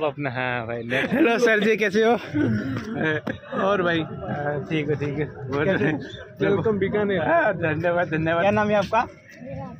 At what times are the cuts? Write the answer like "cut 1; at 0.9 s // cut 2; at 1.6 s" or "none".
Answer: cut 1; at 1.0 s // cut 2; at 8.4 s